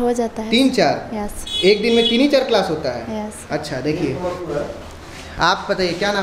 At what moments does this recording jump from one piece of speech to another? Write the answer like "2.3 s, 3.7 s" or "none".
none